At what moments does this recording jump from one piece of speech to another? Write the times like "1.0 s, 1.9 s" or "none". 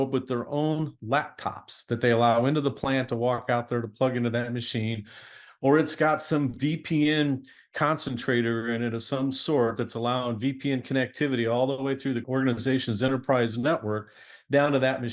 12.2 s